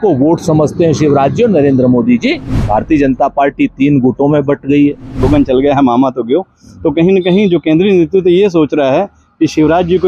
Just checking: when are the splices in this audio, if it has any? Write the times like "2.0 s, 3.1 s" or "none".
2.5 s, 5.2 s